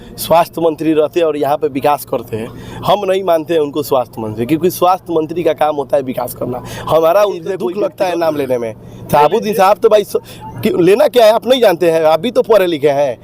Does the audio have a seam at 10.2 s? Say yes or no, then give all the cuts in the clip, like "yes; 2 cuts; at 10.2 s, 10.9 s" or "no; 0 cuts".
no; 1 cut; at 7.7 s